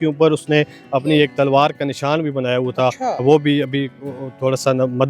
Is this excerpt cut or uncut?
uncut